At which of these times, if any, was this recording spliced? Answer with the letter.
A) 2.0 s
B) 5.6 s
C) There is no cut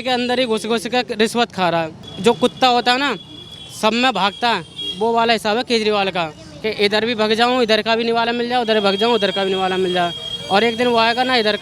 A